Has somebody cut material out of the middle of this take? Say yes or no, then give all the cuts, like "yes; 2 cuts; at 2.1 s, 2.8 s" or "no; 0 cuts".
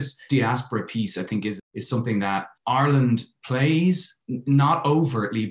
yes; 1 cut; at 1.6 s